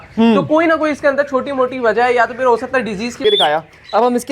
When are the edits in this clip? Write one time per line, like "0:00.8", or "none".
0:03.2